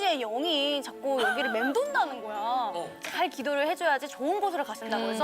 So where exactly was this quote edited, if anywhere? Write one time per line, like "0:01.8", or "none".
0:03.0